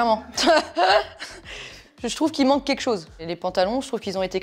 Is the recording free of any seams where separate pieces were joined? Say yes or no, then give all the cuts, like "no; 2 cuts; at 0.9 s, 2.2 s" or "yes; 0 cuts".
yes; 0 cuts